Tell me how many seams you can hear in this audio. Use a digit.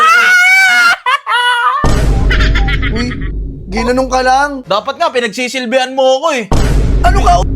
1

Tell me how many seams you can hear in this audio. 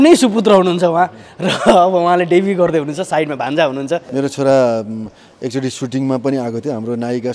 1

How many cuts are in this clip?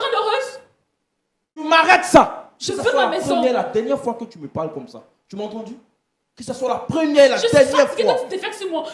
1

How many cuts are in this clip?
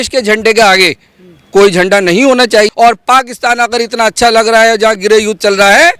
1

